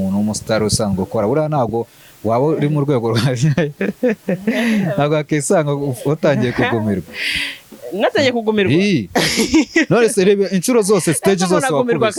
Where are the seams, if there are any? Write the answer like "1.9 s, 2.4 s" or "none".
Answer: none